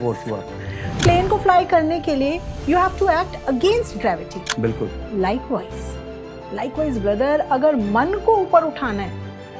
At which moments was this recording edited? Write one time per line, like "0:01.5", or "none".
0:01.0